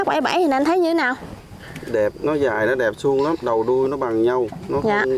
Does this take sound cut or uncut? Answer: uncut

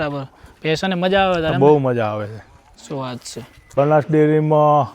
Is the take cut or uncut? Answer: cut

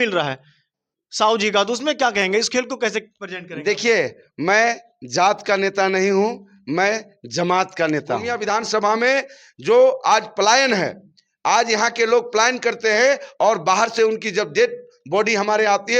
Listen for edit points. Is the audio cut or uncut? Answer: cut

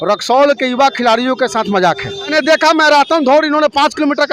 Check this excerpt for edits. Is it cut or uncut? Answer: cut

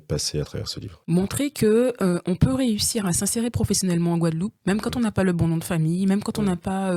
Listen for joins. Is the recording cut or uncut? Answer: uncut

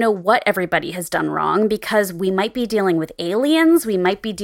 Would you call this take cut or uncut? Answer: uncut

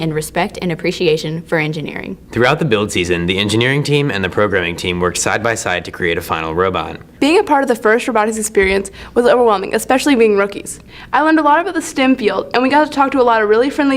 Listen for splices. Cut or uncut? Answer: cut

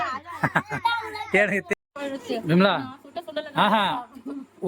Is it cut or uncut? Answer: cut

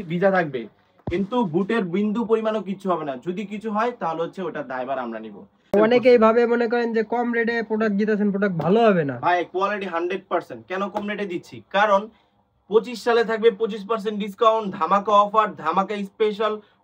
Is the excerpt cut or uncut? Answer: cut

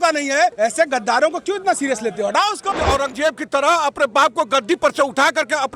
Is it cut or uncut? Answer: cut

